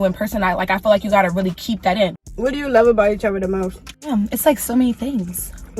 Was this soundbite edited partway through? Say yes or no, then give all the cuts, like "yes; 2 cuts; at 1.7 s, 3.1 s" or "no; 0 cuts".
yes; 2 cuts; at 2.4 s, 4.1 s